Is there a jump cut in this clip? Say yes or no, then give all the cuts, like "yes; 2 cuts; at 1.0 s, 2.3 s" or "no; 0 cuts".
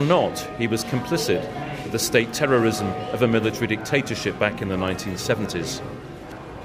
yes; 1 cut; at 3.0 s